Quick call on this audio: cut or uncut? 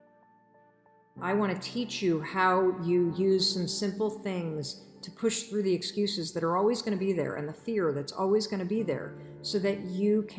cut